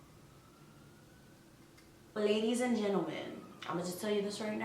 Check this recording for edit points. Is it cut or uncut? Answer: cut